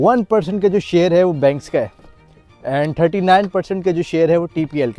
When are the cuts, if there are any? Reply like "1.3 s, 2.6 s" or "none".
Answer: none